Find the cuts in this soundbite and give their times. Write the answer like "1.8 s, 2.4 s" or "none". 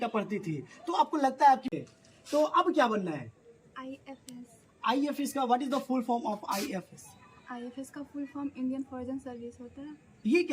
1.7 s